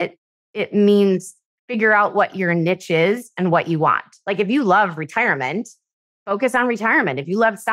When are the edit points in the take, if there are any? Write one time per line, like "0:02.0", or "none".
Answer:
none